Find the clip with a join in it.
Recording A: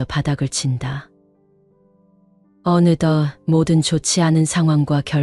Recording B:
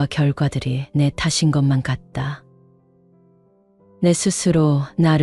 B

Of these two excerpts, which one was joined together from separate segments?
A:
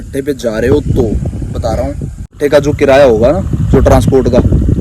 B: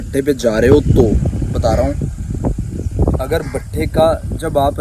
A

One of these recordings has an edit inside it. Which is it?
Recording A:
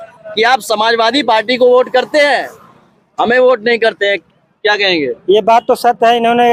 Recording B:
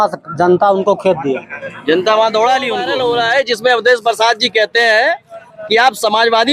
B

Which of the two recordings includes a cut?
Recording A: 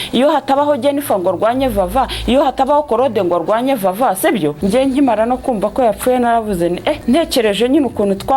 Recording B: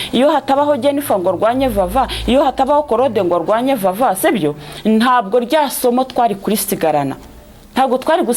A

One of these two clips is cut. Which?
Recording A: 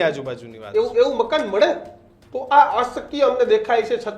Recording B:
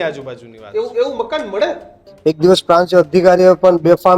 B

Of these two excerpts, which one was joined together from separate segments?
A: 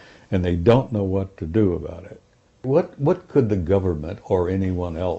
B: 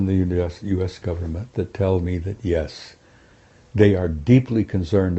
A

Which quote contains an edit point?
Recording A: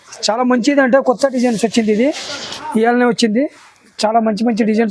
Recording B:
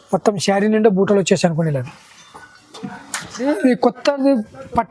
B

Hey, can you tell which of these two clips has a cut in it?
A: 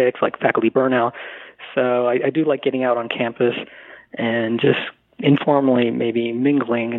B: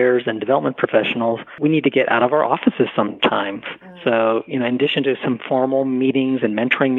B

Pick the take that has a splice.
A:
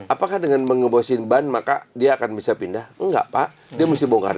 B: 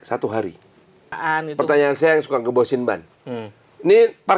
B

